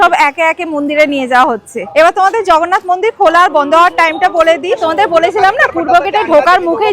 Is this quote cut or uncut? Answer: cut